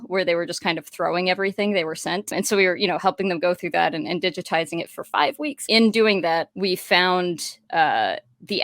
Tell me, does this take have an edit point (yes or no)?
yes